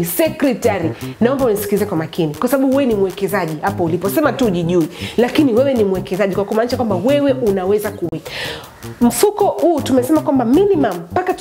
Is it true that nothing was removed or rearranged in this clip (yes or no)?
no